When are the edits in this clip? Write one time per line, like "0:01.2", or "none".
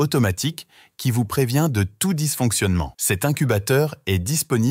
none